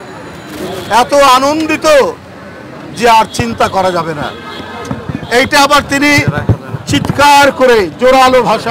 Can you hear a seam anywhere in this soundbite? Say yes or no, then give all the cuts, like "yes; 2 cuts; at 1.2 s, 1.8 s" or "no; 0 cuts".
no; 0 cuts